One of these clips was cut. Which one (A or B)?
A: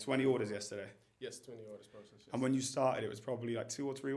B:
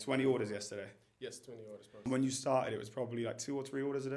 B